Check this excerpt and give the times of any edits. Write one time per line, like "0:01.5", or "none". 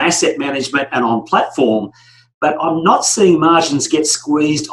none